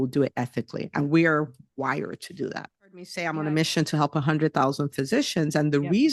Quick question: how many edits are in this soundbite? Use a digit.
1